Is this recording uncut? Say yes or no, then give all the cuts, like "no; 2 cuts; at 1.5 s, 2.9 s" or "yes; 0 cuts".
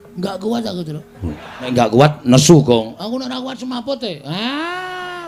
no; 1 cut; at 1.7 s